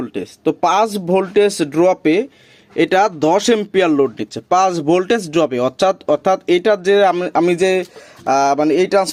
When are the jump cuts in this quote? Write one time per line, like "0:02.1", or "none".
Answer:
none